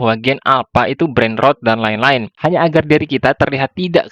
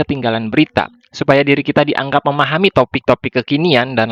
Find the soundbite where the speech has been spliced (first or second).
first